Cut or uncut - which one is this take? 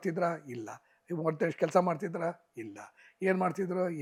uncut